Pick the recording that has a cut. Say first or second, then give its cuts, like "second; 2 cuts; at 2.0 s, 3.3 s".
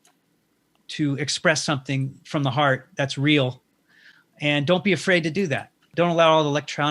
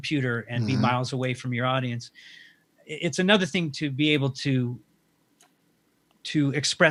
first; 1 cut; at 5.9 s